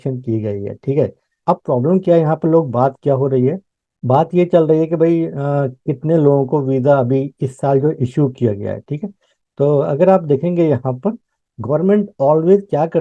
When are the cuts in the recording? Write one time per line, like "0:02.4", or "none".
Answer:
0:01.4
0:11.4